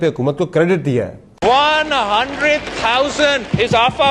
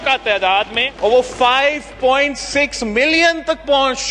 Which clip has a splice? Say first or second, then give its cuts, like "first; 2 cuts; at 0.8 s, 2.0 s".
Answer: first; 1 cut; at 1.2 s